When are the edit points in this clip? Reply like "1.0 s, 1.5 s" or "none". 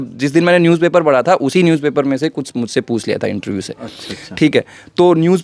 none